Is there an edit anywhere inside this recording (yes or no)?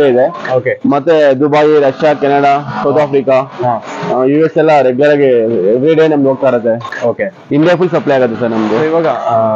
no